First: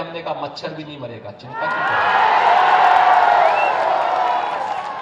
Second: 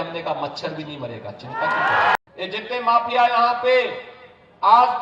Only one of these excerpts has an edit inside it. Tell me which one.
second; 1 cut; at 2.2 s

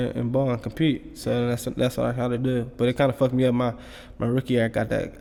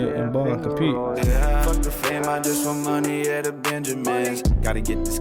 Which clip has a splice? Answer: second; 1 cut; at 0.9 s

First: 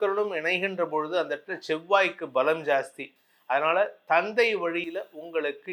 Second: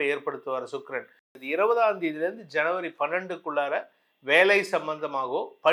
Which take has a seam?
second; 1 cut; at 1.4 s

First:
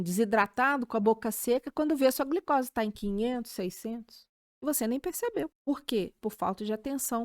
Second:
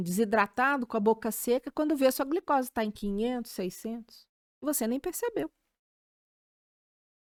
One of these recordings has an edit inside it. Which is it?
first; 1 cut; at 6.1 s

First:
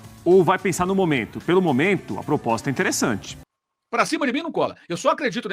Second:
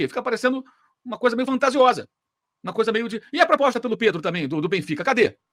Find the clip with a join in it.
first; 1 cut; at 3.3 s

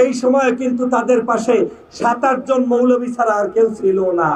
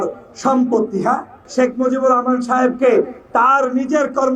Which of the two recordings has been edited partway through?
second; 1 cut; at 1.4 s

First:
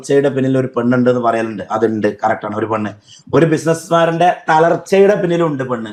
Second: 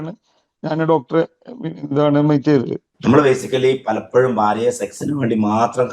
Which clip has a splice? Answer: second; 1 cut; at 2.8 s

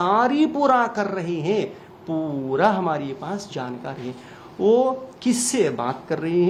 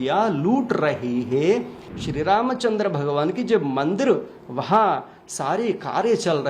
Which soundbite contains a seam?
second; 1 cut; at 1.8 s

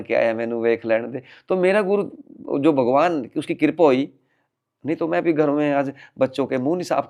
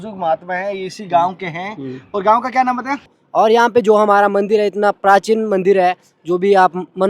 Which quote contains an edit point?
second; 1 cut; at 3.1 s

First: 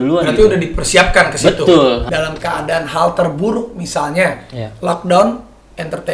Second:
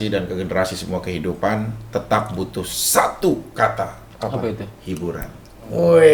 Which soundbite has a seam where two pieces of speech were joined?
first; 1 cut; at 2.1 s

